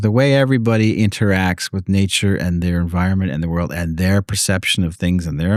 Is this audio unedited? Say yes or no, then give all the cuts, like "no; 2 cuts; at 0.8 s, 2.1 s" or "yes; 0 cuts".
yes; 0 cuts